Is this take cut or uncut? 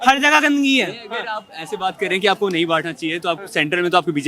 uncut